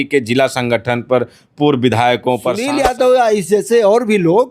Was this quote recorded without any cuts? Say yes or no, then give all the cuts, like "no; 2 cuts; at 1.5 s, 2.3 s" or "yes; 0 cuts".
no; 1 cut; at 2.6 s